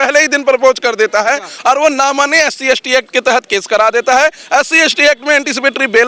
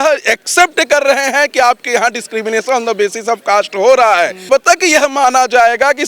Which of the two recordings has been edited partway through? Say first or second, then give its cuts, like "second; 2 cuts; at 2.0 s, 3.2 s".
second; 1 cut; at 4.5 s